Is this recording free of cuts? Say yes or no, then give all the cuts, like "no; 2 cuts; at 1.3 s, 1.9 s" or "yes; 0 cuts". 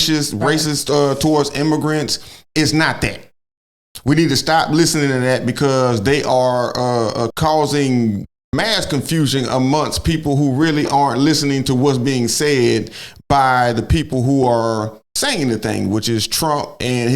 no; 1 cut; at 7.3 s